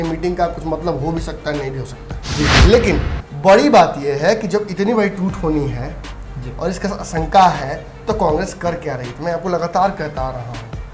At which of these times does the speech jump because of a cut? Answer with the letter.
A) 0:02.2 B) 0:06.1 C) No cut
A